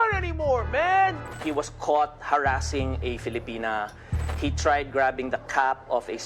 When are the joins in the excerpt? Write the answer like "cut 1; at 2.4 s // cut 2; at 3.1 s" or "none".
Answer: cut 1; at 1.3 s